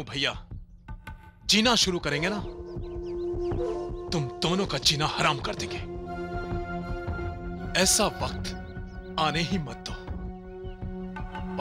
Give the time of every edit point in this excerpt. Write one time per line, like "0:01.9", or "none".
none